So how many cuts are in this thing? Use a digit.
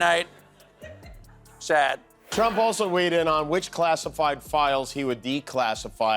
1